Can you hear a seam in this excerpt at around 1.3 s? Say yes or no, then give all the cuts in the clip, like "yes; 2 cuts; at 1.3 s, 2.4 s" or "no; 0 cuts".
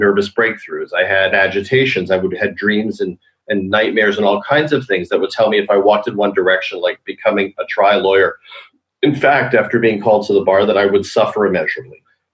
yes; 1 cut; at 1.3 s